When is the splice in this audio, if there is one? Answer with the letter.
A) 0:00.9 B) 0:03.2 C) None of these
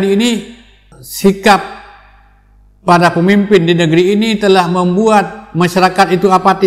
A